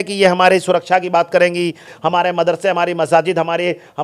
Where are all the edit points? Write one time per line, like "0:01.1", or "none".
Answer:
0:01.9

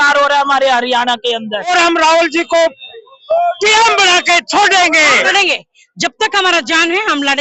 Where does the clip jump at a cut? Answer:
0:01.7
0:05.2

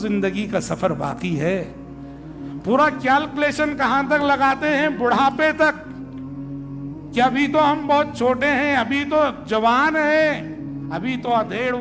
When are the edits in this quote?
0:05.8
0:07.1

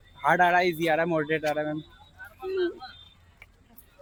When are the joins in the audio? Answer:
none

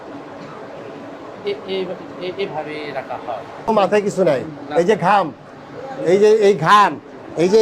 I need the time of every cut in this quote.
0:03.7

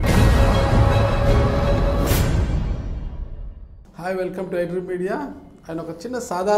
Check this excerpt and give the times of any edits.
none

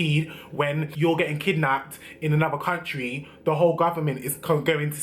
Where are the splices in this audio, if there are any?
0:00.9

